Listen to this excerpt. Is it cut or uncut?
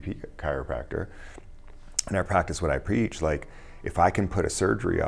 uncut